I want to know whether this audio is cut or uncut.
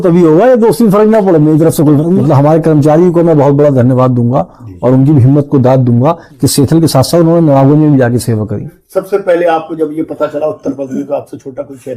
cut